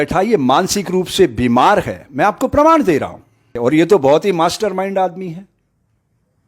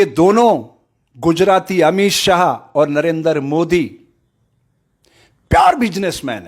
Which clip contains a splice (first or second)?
first